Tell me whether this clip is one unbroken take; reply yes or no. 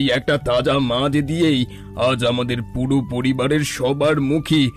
yes